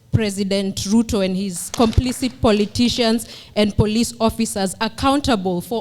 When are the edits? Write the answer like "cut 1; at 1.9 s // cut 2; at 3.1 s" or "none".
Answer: cut 1; at 1.7 s